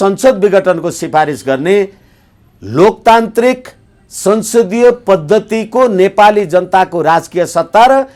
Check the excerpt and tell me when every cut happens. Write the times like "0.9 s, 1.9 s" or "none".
none